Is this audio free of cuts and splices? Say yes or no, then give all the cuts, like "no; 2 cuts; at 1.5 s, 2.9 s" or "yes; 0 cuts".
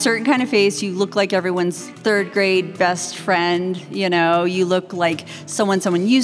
yes; 0 cuts